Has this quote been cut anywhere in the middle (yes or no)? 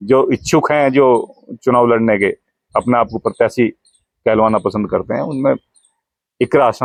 no